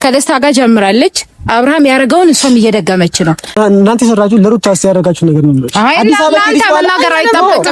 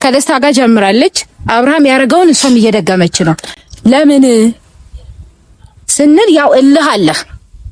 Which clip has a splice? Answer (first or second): first